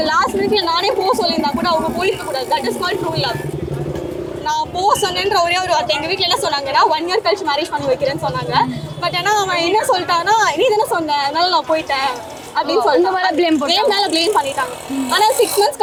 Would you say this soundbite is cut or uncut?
uncut